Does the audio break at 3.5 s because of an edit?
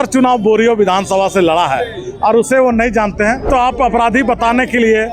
yes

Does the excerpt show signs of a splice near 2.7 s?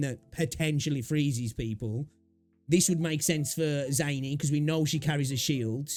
no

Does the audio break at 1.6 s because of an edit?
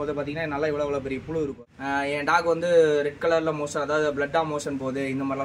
yes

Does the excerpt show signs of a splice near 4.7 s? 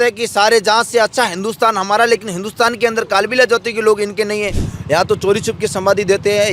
yes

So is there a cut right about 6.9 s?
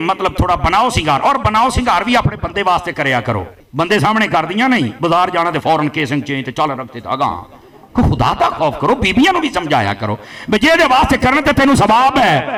no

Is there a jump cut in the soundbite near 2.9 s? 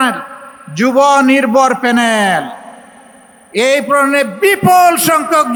no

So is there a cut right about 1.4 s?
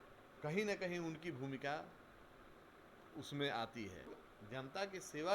no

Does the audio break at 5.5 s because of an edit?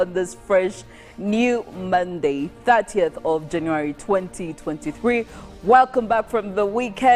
no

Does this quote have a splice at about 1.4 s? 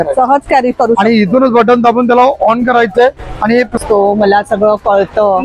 no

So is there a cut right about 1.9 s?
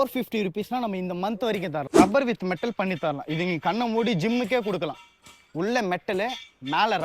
yes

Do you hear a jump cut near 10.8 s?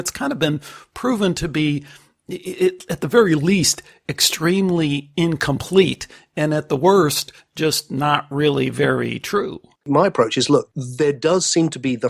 yes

